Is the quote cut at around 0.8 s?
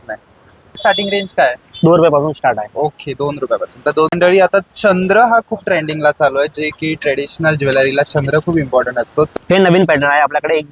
yes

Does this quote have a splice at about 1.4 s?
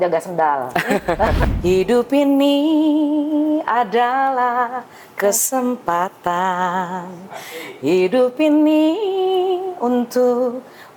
yes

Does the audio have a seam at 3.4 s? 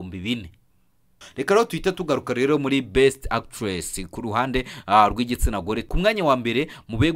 no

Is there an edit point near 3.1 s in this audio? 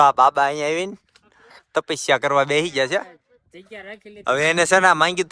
no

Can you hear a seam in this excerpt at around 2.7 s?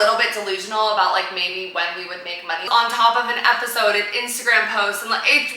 yes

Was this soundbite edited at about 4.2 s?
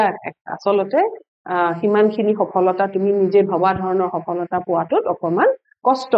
no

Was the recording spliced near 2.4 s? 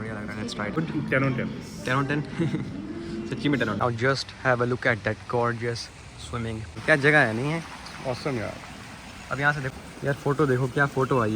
no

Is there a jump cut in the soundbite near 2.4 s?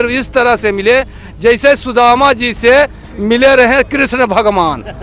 no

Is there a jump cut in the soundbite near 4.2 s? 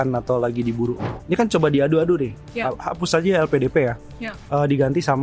no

